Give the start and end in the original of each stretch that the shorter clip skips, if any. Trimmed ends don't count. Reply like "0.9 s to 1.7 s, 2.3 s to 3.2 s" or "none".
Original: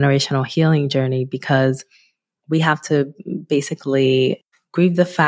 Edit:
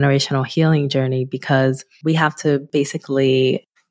1.9 s to 2.3 s, 3.1 s to 3.4 s